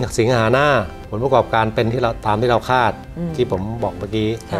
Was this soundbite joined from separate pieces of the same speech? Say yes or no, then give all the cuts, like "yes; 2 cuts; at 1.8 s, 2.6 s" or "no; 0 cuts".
yes; 1 cut; at 1.0 s